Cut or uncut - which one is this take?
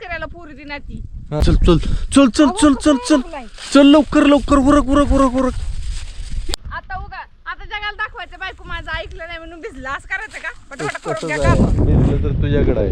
cut